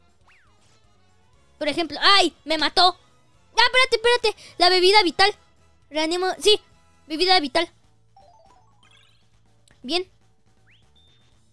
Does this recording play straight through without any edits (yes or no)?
yes